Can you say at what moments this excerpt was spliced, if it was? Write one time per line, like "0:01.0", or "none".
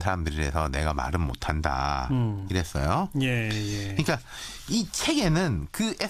none